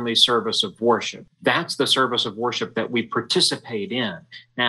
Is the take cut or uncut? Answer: cut